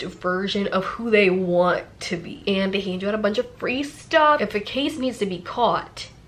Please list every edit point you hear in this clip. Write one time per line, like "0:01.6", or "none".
0:02.3
0:04.4